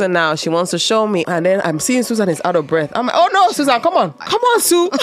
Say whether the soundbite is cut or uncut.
cut